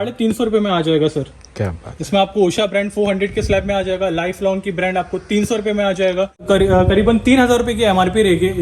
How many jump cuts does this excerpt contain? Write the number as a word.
one